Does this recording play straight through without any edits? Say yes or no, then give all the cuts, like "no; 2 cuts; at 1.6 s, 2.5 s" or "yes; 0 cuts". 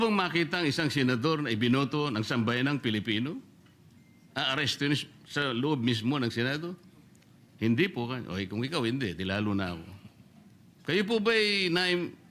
yes; 0 cuts